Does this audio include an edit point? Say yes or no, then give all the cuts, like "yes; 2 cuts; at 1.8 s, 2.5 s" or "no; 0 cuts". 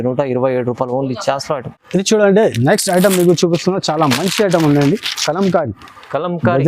yes; 1 cut; at 1.7 s